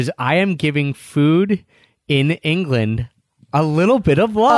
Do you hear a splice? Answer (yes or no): no